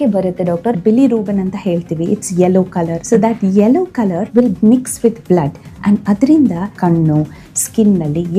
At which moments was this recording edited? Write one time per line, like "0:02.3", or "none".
0:00.8
0:03.0
0:04.2
0:06.7